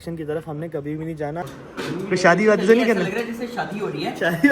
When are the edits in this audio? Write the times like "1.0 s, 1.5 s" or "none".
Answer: 1.5 s